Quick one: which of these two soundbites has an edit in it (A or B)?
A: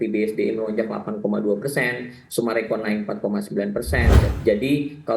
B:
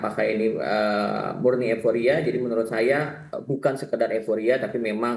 A